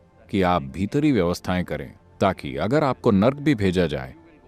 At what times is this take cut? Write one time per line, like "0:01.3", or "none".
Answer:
0:02.0